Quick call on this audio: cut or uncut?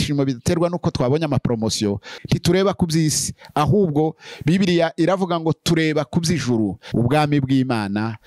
cut